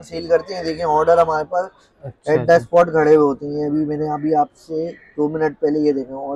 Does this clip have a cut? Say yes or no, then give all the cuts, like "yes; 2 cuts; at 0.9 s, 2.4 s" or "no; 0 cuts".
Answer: no; 0 cuts